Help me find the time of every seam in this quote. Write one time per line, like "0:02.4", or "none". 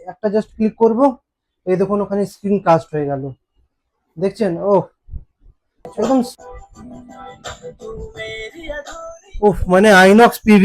0:06.3